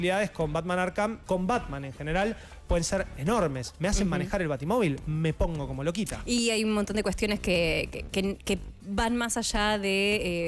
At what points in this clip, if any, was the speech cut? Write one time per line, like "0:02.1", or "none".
0:01.2